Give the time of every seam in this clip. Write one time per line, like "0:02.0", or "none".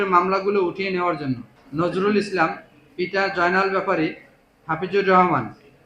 0:01.6

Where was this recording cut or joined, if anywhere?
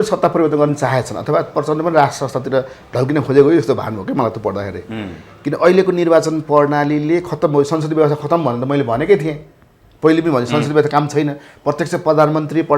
none

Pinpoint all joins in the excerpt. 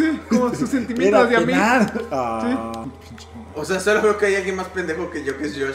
0:02.9

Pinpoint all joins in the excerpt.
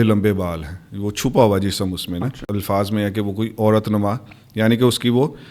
0:02.5

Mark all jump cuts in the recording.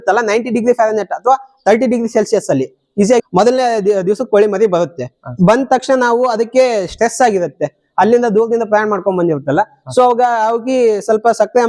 0:03.2

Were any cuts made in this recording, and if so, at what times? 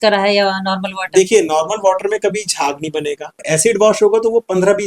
0:03.4

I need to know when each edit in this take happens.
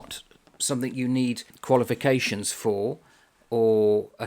0:01.5

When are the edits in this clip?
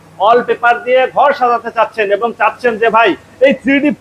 none

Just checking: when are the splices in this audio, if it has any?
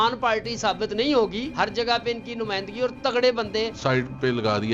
0:01.5
0:03.8

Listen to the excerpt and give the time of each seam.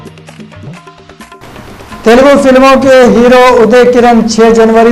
0:01.4

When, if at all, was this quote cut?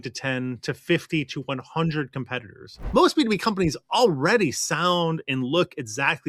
0:02.8

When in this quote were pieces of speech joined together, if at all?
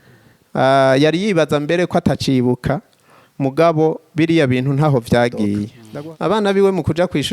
0:05.8

